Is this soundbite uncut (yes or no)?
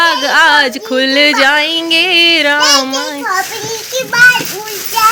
yes